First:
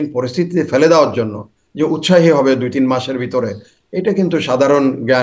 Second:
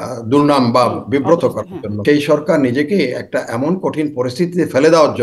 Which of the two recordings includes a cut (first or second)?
second